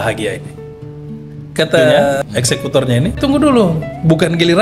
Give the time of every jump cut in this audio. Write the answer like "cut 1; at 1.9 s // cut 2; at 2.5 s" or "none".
cut 1; at 3.2 s